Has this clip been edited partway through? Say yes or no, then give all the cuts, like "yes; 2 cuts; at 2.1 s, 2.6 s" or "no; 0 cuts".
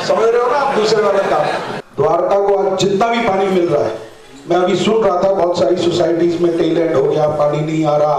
yes; 1 cut; at 1.8 s